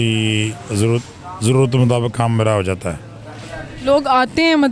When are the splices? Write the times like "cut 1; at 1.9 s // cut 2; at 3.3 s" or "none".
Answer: none